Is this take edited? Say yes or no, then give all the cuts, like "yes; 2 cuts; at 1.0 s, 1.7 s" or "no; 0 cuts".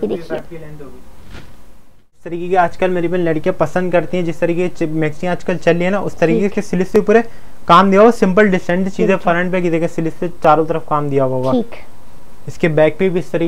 yes; 1 cut; at 2.3 s